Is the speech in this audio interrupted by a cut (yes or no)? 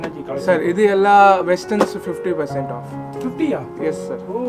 no